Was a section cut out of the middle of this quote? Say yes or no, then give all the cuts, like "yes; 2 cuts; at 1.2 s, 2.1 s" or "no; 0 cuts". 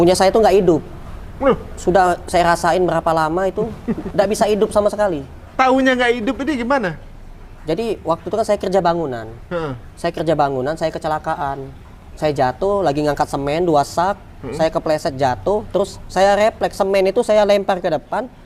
no; 0 cuts